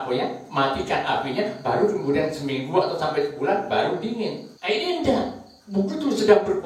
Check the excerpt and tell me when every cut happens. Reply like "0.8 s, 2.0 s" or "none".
4.5 s